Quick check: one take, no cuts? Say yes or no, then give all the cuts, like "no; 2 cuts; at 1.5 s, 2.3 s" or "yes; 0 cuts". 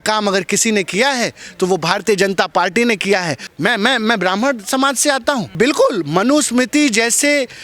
no; 2 cuts; at 3.4 s, 5.5 s